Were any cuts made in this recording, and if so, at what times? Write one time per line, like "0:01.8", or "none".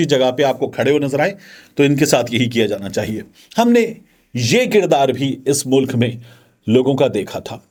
none